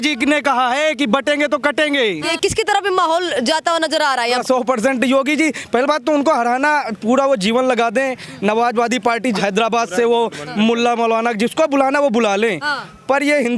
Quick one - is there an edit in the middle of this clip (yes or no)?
yes